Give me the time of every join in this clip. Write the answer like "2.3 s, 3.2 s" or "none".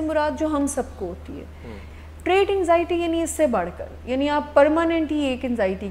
1.8 s